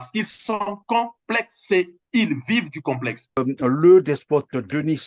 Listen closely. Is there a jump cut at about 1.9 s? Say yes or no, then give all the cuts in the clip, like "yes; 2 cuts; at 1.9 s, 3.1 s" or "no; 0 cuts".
no; 1 cut; at 3.2 s